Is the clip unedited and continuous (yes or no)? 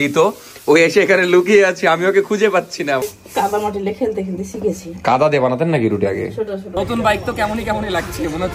no